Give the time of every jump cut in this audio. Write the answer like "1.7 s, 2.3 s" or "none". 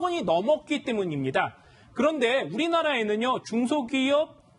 2.6 s